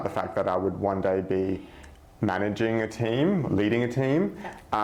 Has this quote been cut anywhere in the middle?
no; 0 cuts

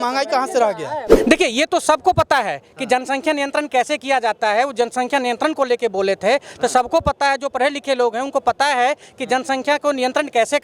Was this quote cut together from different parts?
yes; 1 cut; at 1.1 s

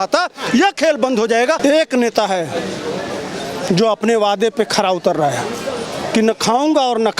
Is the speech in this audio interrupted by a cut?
yes; 1 cut; at 1.6 s

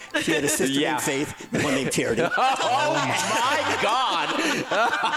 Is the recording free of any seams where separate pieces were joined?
yes; 0 cuts

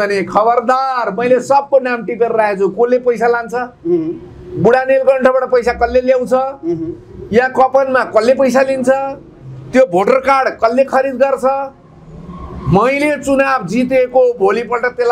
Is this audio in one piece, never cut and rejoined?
yes; 0 cuts

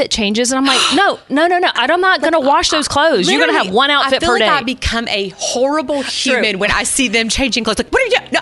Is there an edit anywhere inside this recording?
no; 0 cuts

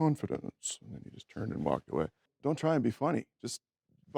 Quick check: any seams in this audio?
yes; 1 cut; at 2.2 s

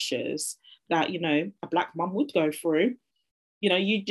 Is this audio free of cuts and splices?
yes; 0 cuts

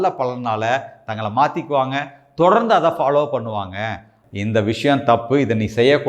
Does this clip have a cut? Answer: yes; 1 cut; at 4.1 s

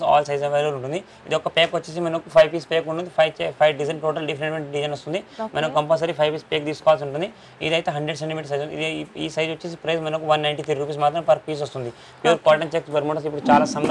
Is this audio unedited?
yes; 0 cuts

